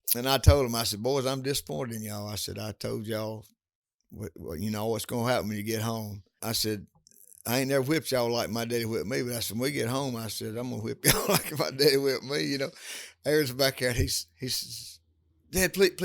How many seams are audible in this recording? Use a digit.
1